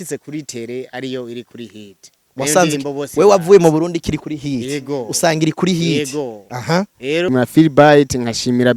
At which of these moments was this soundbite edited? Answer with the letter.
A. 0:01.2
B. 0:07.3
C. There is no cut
B